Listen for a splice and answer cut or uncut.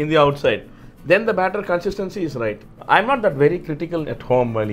cut